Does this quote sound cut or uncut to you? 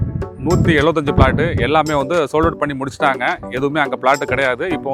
uncut